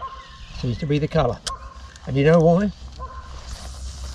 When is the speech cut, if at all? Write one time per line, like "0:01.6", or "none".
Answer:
none

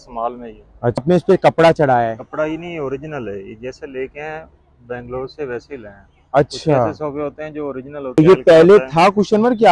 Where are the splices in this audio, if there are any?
0:01.0
0:08.2

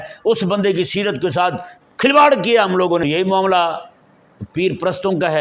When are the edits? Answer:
0:03.0

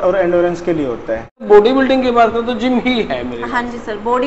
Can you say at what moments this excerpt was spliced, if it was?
0:01.4

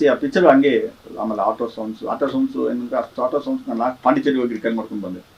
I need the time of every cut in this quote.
0:01.0

